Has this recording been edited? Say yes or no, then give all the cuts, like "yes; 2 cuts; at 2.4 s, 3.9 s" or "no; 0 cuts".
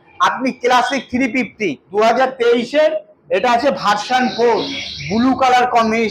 yes; 1 cut; at 1.8 s